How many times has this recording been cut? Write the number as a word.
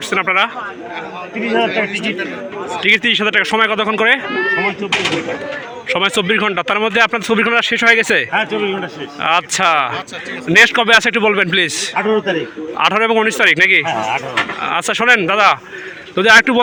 zero